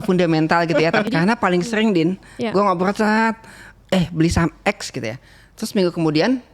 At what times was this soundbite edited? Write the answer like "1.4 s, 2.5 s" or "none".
1.1 s